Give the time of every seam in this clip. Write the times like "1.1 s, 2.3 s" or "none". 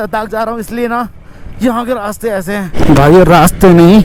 2.8 s